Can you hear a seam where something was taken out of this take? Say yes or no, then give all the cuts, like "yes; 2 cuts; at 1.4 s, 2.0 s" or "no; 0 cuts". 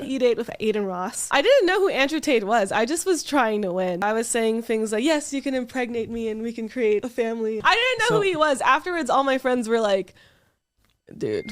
yes; 3 cuts; at 1.3 s, 4.0 s, 7.5 s